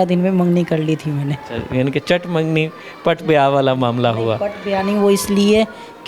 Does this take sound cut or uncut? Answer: uncut